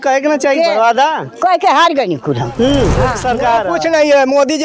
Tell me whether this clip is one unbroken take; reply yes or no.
no